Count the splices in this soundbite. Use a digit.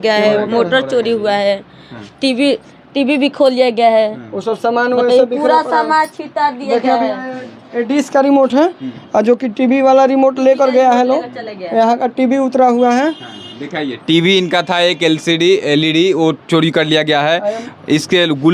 0